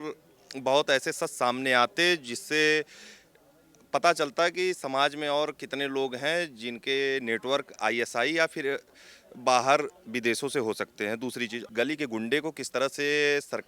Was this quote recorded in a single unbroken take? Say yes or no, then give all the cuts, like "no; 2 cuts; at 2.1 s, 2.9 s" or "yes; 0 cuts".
no; 1 cut; at 11.6 s